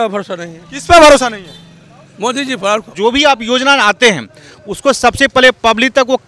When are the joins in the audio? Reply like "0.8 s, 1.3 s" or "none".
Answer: 2.9 s